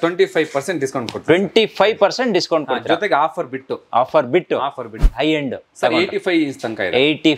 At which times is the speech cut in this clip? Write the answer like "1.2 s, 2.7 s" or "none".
4.9 s